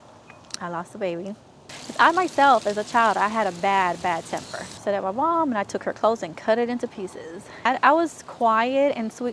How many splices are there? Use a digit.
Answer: 3